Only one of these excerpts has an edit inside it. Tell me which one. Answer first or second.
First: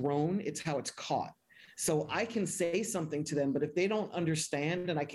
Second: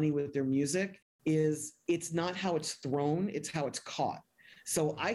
second